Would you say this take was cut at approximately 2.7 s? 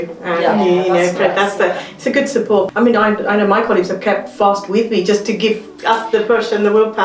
yes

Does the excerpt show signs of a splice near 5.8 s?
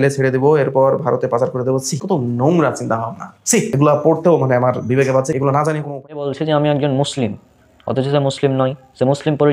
yes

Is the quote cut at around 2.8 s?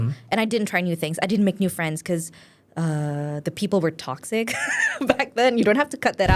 no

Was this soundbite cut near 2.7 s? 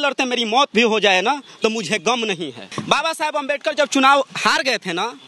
yes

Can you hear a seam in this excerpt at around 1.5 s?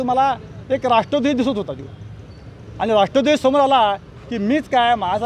no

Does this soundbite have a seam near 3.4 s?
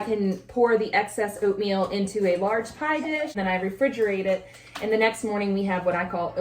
yes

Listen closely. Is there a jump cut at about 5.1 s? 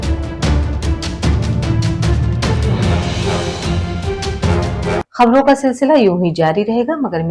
yes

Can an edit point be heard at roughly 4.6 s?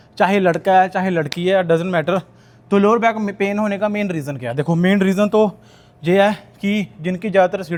no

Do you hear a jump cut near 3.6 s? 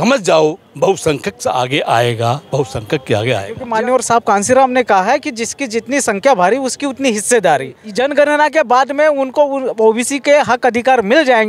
yes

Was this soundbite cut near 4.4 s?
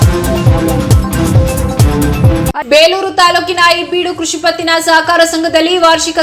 no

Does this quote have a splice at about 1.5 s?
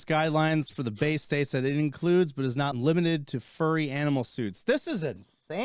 no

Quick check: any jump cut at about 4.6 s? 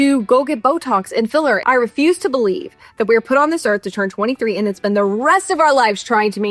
no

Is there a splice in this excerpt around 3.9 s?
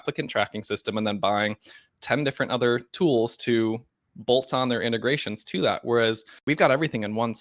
no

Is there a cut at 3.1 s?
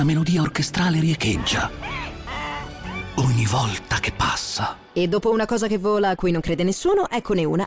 yes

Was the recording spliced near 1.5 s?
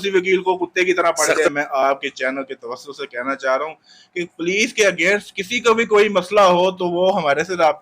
yes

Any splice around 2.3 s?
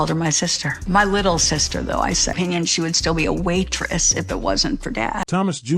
no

